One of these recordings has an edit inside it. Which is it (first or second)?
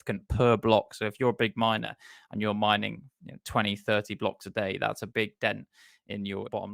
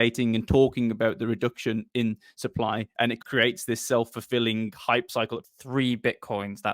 second